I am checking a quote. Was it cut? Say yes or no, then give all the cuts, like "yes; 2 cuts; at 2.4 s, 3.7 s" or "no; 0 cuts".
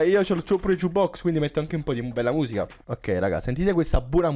no; 0 cuts